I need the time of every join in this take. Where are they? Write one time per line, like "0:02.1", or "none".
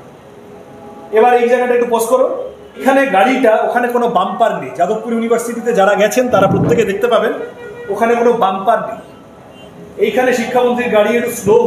0:02.8